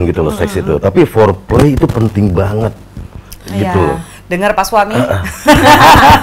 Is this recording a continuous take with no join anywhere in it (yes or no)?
yes